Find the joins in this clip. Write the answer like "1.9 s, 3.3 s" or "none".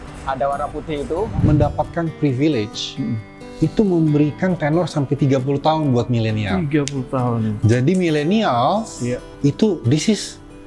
1.4 s